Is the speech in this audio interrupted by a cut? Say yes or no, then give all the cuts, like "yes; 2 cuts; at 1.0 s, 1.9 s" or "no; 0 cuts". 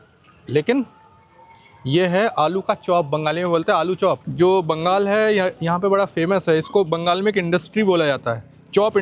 yes; 1 cut; at 4.3 s